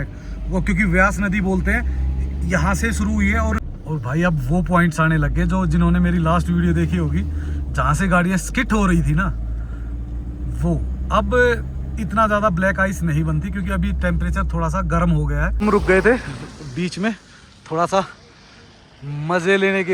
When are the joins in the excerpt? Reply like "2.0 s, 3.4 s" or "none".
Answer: 3.6 s, 15.5 s